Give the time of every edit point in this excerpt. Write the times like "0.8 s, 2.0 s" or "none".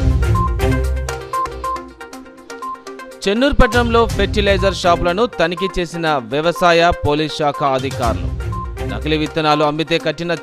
1.2 s